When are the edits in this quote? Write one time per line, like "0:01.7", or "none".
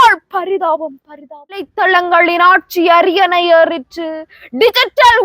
0:01.7